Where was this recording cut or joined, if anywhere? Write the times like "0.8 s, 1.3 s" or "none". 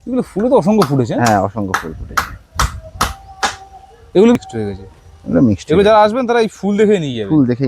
4.4 s